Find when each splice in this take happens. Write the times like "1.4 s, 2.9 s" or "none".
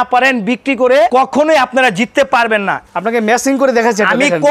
1.1 s, 2.8 s